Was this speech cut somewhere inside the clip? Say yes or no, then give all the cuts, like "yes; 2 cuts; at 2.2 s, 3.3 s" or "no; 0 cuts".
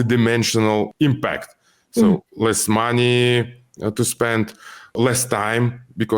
yes; 2 cuts; at 0.9 s, 4.9 s